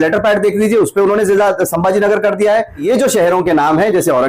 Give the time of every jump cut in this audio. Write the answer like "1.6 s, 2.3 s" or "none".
2.8 s